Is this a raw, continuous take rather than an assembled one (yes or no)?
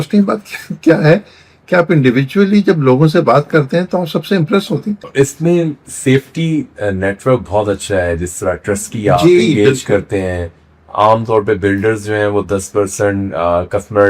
no